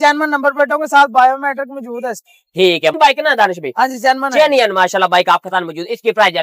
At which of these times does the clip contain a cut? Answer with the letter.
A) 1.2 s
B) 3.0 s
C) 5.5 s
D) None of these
B